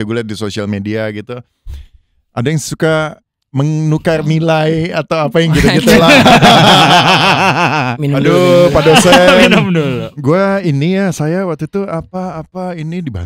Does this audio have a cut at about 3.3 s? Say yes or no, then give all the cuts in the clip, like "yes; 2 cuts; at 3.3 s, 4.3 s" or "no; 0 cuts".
no; 0 cuts